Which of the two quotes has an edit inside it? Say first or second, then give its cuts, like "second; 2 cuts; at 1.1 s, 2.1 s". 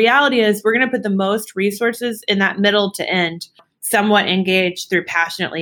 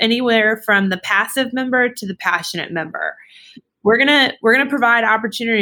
first; 1 cut; at 3.7 s